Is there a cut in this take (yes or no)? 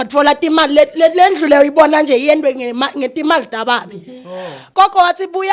yes